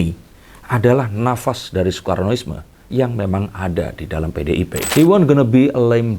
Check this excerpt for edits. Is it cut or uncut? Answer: cut